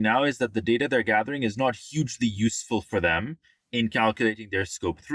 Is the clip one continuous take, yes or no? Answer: yes